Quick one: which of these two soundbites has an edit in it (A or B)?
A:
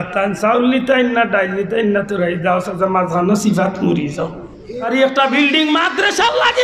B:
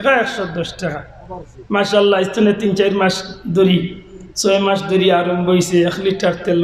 A